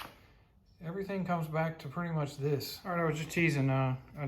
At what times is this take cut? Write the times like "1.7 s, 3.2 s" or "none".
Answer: 2.8 s